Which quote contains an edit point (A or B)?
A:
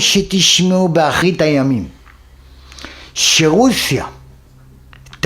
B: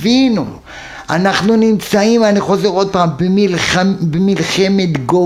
A